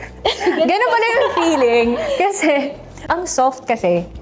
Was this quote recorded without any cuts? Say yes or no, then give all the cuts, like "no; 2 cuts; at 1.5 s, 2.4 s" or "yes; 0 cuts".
yes; 0 cuts